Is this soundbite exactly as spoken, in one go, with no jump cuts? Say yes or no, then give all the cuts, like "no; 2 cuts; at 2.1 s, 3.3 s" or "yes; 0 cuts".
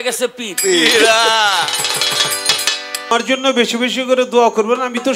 no; 1 cut; at 3.1 s